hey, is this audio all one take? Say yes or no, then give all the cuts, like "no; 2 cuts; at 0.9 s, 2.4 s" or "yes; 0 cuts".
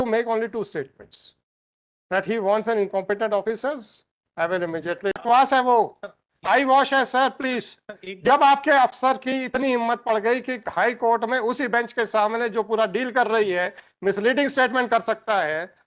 no; 1 cut; at 5.2 s